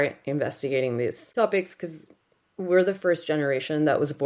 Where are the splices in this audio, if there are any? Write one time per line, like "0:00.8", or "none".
0:01.2